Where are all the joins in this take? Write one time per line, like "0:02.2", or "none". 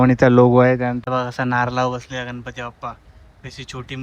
0:01.0